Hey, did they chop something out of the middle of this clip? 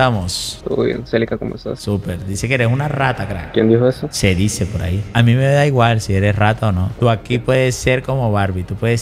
no; 0 cuts

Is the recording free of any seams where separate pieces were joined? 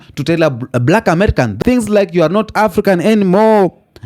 no; 1 cut; at 1.6 s

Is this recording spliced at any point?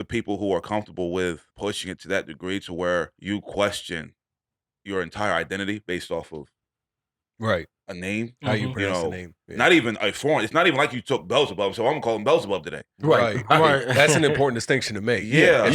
yes; 2 cuts; at 1.5 s, 3.2 s

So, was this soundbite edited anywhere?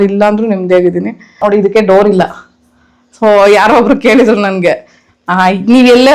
yes; 1 cut; at 1.3 s

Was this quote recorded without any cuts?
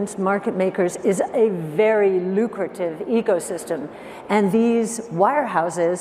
yes; 0 cuts

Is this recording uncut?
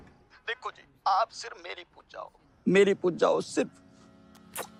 yes; 0 cuts

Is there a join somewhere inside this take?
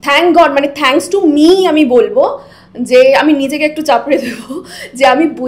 no; 0 cuts

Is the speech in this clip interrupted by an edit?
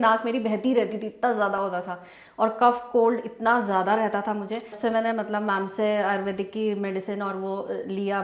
yes; 1 cut; at 4.7 s

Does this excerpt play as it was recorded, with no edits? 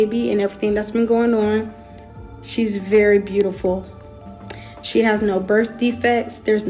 yes; 0 cuts

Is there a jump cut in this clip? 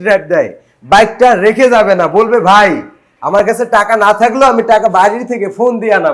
no; 0 cuts

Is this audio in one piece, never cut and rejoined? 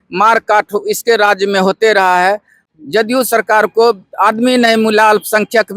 no; 1 cut; at 2.6 s

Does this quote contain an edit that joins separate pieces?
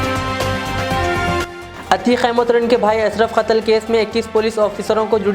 yes; 1 cut; at 1.4 s

